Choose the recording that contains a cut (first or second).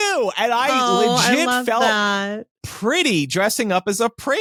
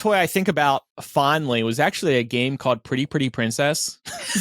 second